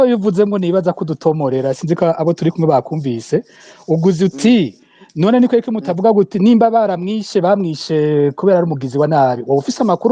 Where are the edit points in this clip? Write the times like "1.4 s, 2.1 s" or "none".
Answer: none